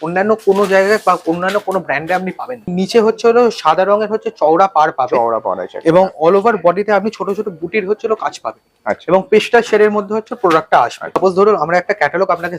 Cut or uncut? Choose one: cut